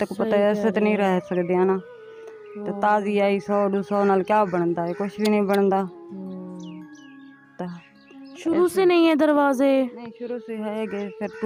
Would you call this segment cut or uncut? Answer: uncut